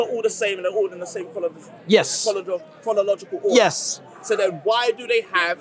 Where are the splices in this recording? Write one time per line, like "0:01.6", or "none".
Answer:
none

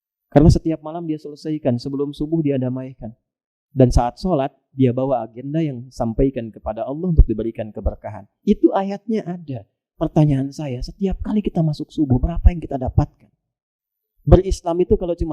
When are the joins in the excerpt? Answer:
none

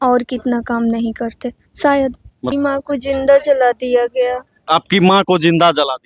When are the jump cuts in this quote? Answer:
0:02.5

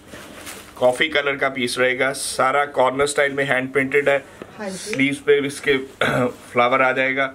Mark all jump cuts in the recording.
none

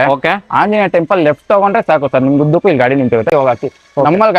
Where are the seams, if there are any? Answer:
0:03.3

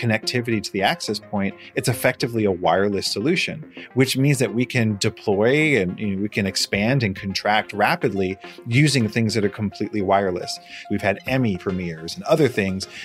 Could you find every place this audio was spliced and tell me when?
0:11.6

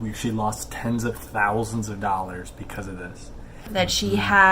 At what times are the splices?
0:03.6

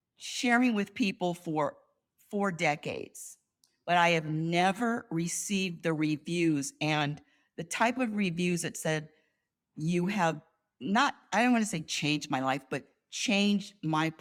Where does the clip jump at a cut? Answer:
none

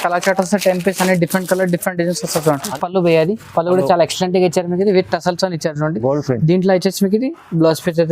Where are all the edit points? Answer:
0:02.7

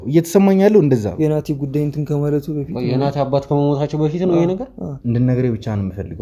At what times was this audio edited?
0:01.1
0:04.9

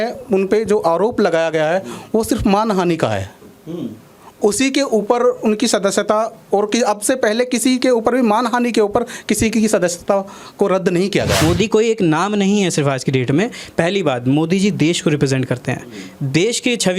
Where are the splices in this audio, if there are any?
0:11.4

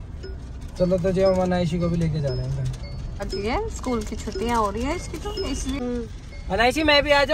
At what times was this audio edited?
0:03.3
0:05.8

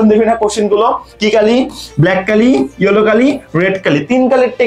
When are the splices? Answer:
0:01.1

